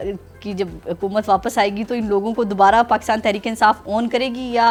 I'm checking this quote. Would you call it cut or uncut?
uncut